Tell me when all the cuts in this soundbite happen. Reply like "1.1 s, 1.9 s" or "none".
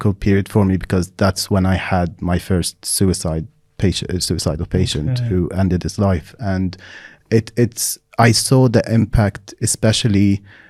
none